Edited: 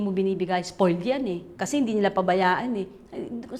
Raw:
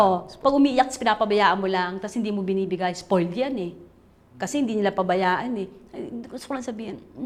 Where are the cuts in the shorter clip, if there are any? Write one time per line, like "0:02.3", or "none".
0:01.5